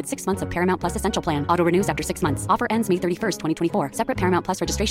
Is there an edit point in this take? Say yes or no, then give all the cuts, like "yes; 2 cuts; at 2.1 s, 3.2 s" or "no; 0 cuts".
no; 0 cuts